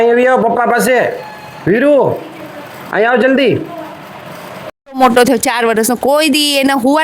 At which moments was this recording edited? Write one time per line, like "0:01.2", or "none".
0:04.8